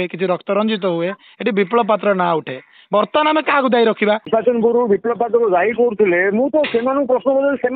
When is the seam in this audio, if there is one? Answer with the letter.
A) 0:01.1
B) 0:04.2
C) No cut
B